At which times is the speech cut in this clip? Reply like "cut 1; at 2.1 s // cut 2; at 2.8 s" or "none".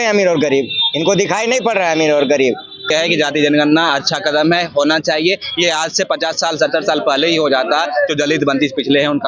cut 1; at 2.9 s

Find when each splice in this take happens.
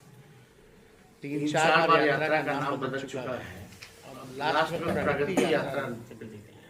none

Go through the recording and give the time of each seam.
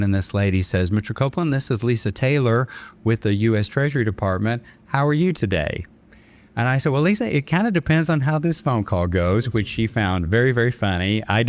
none

